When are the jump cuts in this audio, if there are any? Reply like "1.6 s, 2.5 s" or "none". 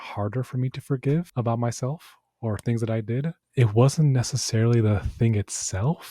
1.3 s, 3.4 s